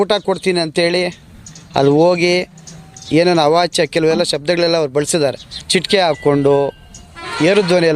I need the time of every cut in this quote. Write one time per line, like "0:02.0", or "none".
0:05.5